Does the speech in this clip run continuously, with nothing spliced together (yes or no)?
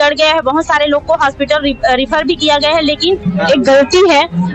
no